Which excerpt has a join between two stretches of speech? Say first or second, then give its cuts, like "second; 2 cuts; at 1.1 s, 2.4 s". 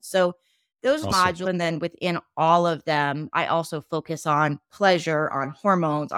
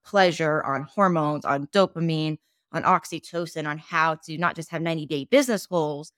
first; 1 cut; at 1.1 s